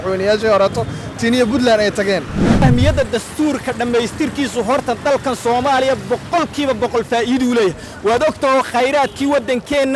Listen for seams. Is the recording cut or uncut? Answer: cut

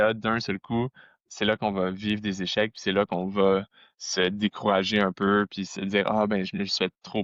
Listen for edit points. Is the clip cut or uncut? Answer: uncut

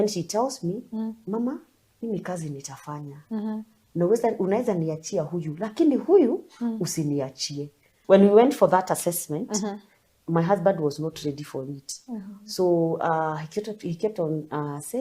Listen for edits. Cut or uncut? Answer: cut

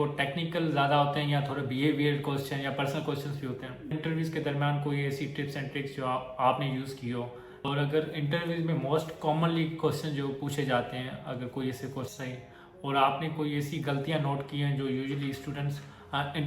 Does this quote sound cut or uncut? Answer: cut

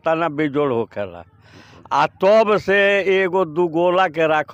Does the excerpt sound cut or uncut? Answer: uncut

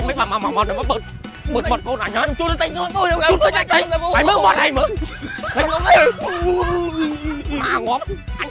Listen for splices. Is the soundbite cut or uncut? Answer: uncut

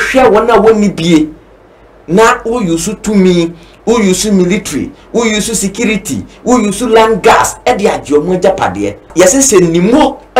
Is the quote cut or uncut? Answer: cut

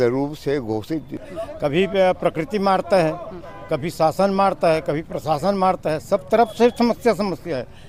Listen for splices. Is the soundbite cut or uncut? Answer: cut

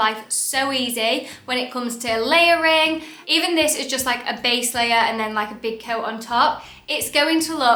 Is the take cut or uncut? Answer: uncut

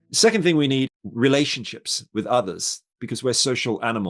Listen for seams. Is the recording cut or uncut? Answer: cut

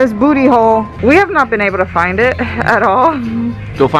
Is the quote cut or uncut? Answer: cut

